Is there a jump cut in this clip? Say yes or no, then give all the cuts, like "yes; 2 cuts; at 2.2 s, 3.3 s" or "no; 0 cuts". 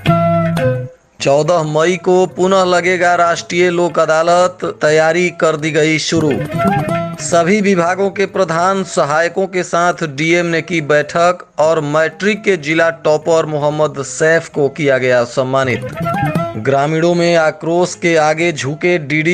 yes; 1 cut; at 0.9 s